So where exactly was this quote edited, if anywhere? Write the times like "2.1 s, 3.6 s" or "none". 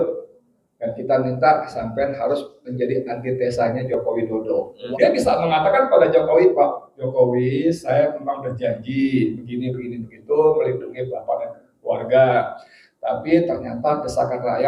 4.7 s